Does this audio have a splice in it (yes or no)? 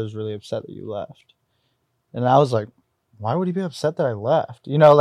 no